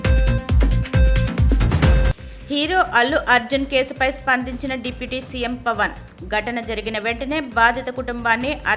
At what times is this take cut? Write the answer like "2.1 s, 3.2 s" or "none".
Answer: 1.8 s

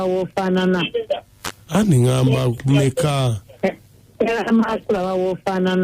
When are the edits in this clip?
1.3 s

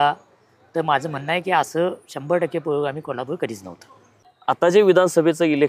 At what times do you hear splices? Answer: 4.4 s

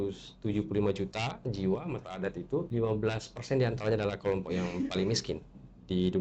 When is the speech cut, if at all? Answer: 2.7 s

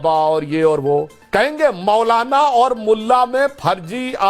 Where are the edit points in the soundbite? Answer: 1.2 s

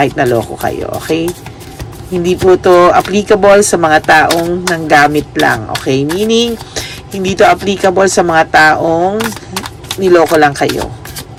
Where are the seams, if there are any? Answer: none

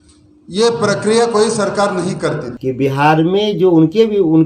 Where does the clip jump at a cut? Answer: 2.5 s

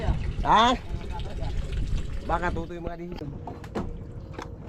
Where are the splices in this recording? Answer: 3.2 s

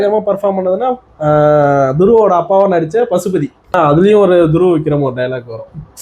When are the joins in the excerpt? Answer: 3.7 s

